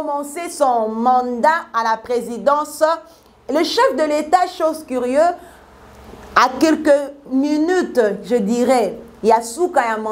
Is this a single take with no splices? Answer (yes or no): yes